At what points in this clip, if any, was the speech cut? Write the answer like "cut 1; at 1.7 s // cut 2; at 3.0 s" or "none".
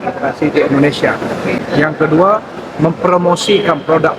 cut 1; at 1.6 s